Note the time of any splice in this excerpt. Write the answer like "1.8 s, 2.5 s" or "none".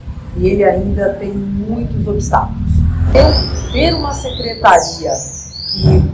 3.1 s